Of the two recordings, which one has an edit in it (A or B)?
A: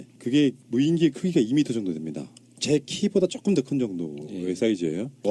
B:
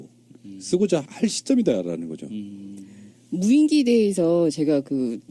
B